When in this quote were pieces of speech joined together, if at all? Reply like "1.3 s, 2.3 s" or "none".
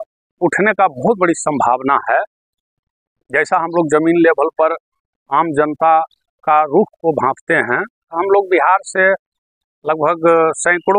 8.1 s